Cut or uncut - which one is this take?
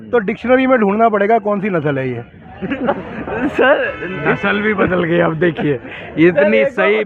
uncut